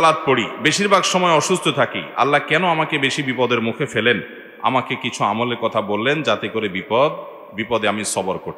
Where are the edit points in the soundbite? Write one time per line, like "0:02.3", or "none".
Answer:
none